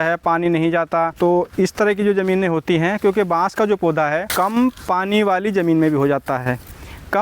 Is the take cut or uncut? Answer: cut